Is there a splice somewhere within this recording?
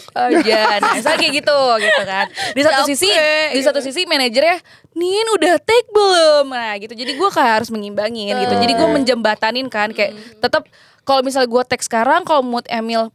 no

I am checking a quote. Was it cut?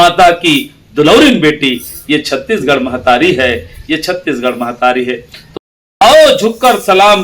yes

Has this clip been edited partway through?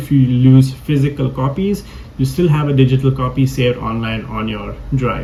no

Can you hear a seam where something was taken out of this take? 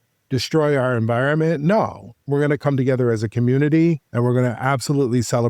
yes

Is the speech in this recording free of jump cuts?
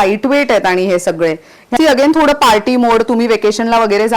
no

